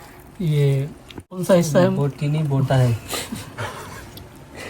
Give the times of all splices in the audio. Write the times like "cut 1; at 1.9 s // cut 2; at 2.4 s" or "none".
cut 1; at 1.4 s